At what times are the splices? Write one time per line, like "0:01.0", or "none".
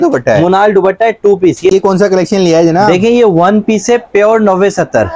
0:01.7